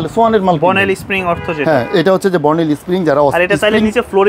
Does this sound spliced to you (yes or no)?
no